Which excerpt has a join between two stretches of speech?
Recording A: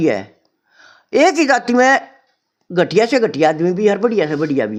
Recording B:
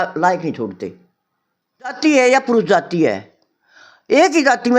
B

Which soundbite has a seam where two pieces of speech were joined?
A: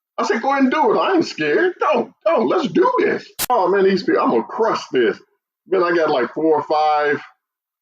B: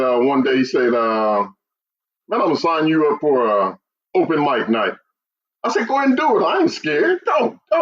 A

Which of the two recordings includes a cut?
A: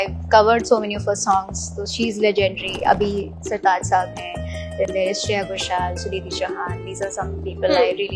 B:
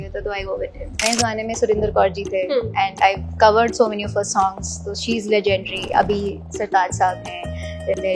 B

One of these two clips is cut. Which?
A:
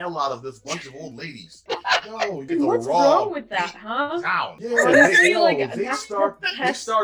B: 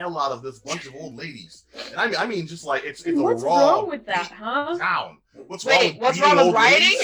A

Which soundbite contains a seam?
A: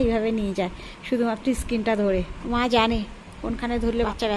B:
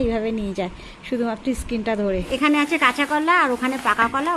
B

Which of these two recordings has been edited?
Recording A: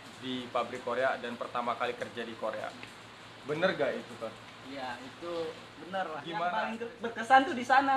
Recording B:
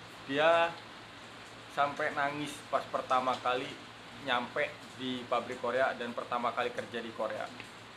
A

